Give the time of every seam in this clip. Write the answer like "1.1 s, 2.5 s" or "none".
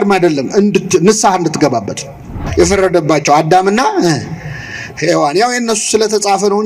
2.4 s